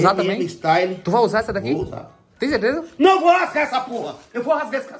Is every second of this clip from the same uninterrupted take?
yes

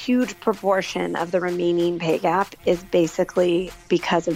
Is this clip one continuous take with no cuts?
yes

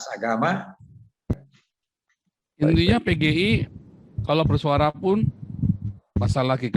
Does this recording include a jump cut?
yes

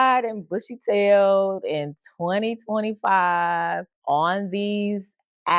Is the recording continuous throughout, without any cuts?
no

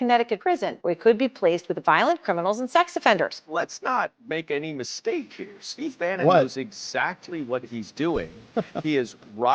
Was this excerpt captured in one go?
no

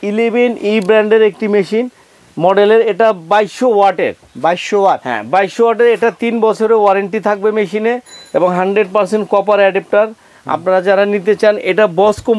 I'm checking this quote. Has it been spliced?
no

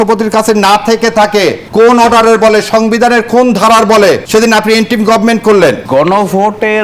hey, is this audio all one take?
no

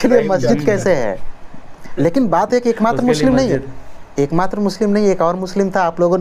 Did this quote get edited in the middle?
no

